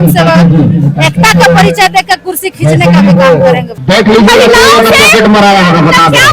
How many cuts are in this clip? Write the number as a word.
one